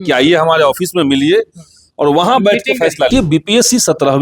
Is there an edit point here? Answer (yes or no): yes